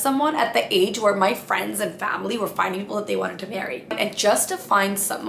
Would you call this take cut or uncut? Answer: uncut